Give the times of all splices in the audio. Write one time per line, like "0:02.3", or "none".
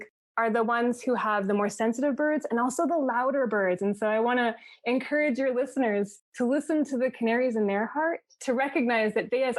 0:06.2